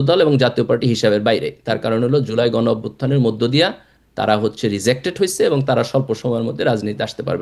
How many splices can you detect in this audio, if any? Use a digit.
0